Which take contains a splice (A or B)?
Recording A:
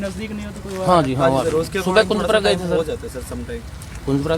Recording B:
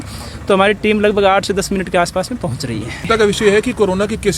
B